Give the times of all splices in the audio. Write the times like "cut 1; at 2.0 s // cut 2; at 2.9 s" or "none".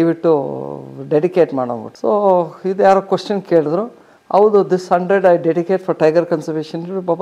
none